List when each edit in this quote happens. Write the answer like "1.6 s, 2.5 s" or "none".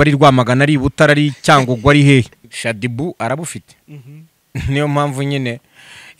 2.4 s